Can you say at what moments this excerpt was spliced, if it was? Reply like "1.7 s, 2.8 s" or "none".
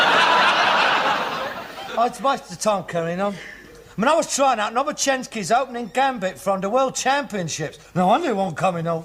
3.9 s